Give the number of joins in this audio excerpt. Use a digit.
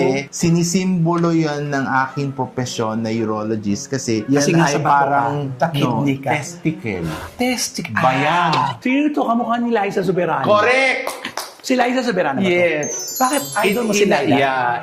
2